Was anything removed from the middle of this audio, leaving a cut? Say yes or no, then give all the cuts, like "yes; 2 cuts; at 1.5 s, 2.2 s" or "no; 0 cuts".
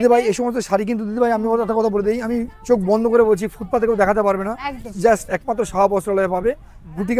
no; 0 cuts